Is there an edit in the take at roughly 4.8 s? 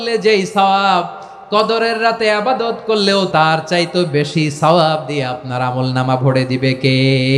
no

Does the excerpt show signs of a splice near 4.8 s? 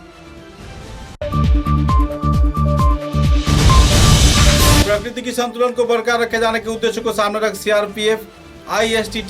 yes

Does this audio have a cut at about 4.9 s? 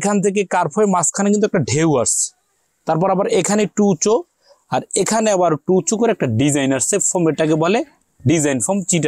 no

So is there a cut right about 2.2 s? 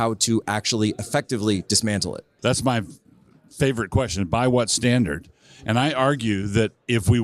yes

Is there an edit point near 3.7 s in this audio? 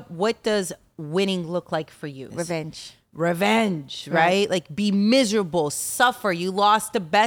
no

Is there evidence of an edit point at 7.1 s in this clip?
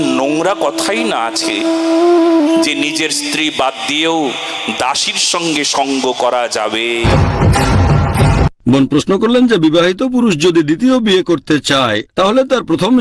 yes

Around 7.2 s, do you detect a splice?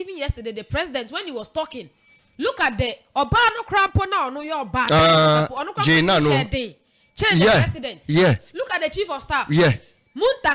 no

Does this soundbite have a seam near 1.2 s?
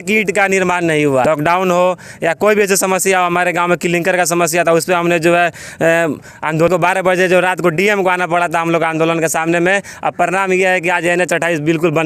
yes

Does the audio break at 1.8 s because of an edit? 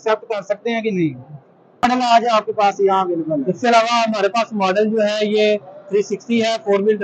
yes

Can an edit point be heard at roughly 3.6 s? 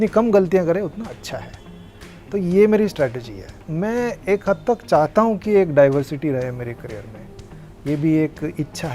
yes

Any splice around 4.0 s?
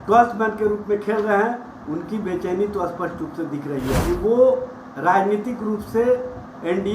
yes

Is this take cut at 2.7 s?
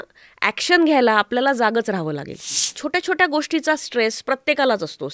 yes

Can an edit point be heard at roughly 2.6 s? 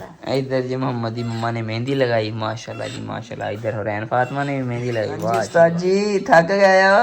no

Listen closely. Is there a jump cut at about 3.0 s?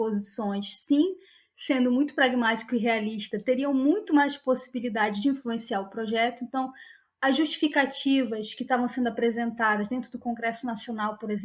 no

